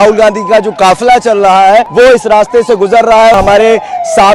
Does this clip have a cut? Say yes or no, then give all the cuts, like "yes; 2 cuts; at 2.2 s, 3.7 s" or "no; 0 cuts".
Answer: yes; 2 cuts; at 1.9 s, 3.4 s